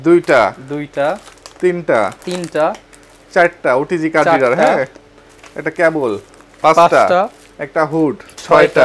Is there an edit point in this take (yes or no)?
no